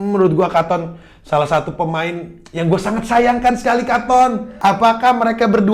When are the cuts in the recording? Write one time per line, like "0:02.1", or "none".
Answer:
0:04.5